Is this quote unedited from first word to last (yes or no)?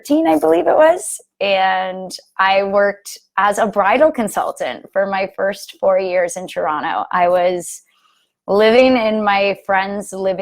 yes